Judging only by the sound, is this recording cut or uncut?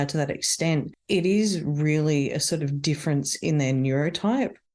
uncut